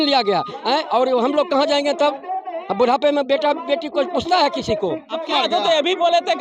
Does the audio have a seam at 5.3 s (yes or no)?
yes